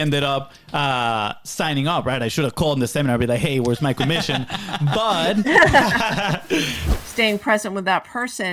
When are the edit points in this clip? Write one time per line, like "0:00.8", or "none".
0:06.8